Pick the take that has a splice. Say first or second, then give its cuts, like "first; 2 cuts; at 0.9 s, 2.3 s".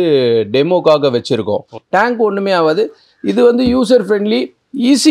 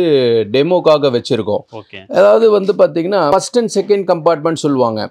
first; 1 cut; at 1.7 s